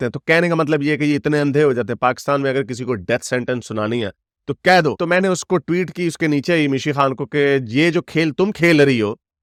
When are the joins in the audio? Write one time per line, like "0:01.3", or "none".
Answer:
none